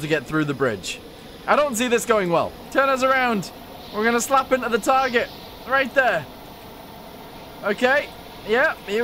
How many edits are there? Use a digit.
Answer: 1